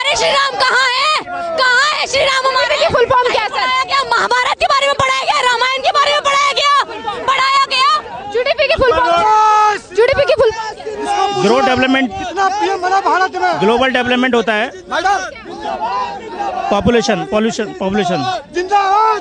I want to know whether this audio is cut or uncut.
uncut